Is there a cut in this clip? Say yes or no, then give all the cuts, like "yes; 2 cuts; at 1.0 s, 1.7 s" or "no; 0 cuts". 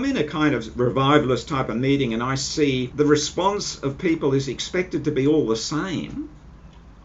yes; 1 cut; at 2.9 s